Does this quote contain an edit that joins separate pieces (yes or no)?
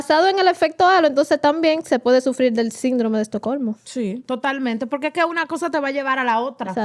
yes